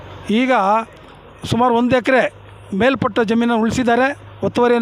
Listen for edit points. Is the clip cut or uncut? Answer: uncut